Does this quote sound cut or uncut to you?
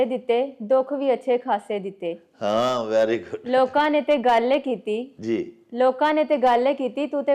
uncut